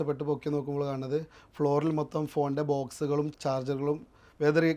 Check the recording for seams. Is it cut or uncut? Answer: cut